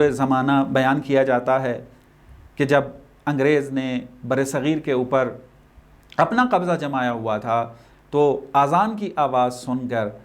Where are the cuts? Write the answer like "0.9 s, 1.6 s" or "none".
none